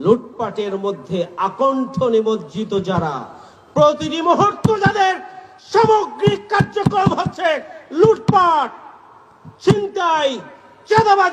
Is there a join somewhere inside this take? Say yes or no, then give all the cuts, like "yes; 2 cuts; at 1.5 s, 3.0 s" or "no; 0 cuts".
no; 0 cuts